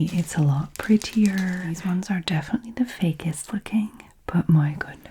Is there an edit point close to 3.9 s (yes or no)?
no